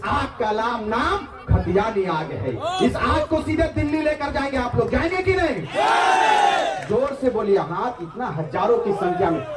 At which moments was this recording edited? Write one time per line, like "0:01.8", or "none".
none

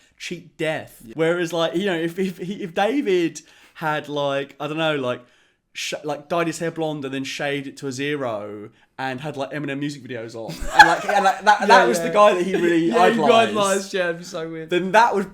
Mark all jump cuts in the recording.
0:01.0

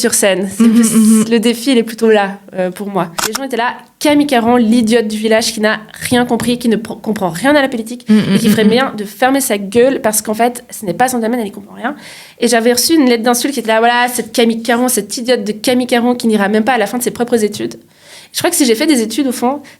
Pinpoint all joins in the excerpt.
0:03.3

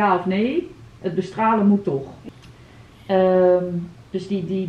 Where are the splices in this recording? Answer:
0:02.2

